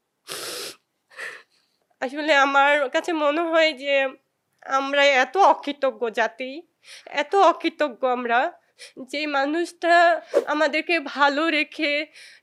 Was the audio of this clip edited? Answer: no; 0 cuts

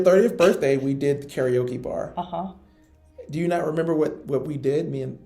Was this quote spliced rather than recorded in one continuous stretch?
no; 0 cuts

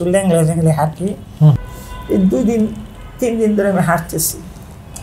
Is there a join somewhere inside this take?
yes; 1 cut; at 1.6 s

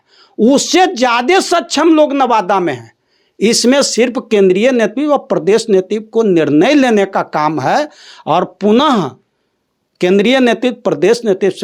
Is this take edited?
no; 0 cuts

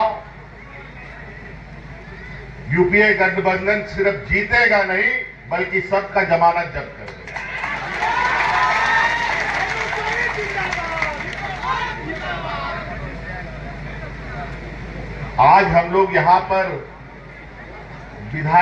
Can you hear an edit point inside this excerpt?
no; 0 cuts

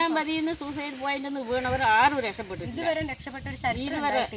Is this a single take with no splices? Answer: yes; 0 cuts

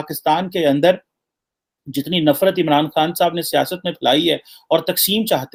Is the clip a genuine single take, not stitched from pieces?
yes; 0 cuts

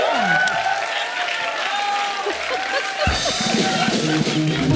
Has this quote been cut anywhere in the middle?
no; 0 cuts

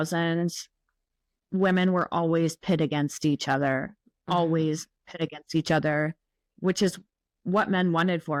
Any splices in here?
no; 0 cuts

